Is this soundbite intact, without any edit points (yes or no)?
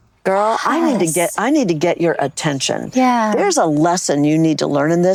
yes